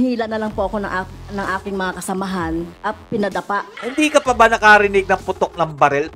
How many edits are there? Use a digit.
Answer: 2